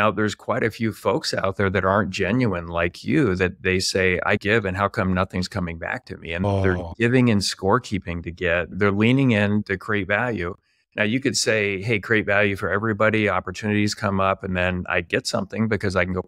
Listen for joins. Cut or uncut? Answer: cut